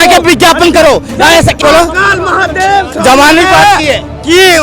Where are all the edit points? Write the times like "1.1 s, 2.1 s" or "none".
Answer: 1.6 s